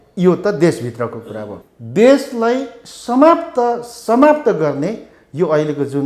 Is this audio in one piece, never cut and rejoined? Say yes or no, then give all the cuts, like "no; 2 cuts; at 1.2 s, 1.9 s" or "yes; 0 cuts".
no; 1 cut; at 1.5 s